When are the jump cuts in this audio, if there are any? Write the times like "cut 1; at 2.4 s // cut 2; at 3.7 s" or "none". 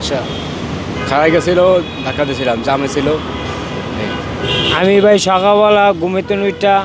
cut 1; at 4.7 s